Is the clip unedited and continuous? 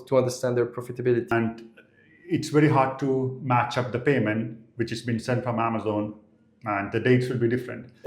no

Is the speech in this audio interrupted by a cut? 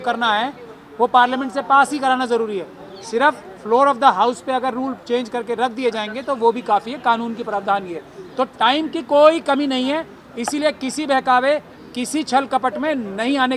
no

